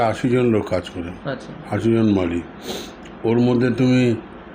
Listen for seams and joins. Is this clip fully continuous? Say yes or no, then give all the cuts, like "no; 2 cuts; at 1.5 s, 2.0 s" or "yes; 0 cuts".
yes; 0 cuts